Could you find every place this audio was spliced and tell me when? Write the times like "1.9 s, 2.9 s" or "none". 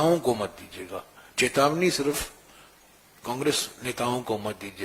none